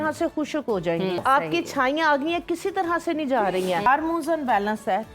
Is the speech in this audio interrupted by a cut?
yes; 2 cuts; at 1.2 s, 3.9 s

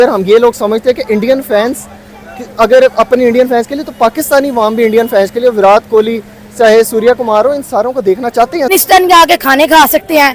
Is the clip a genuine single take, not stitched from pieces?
no; 1 cut; at 8.7 s

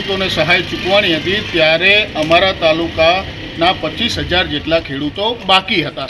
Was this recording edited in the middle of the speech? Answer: no; 0 cuts

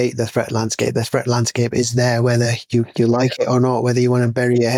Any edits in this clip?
no; 0 cuts

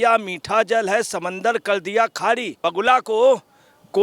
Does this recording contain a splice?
yes; 1 cut; at 2.7 s

